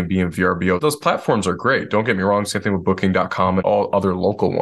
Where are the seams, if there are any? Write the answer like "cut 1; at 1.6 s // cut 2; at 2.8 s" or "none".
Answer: cut 1; at 0.8 s // cut 2; at 3.6 s